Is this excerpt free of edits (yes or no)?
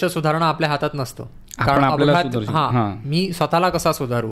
yes